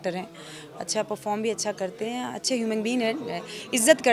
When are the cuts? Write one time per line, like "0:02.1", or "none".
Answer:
none